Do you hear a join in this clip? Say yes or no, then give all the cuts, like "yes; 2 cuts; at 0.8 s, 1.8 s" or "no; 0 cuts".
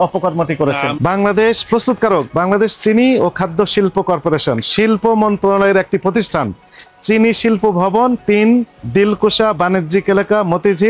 yes; 1 cut; at 0.9 s